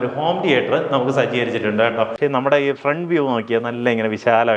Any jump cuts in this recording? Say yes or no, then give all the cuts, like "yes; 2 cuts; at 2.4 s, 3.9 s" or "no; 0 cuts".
yes; 1 cut; at 2.2 s